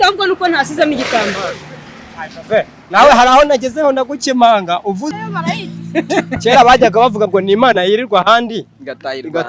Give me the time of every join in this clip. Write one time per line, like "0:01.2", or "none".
0:05.1